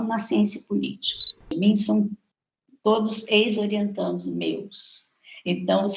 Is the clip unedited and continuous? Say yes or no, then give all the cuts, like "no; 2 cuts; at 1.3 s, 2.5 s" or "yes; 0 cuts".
no; 1 cut; at 1.5 s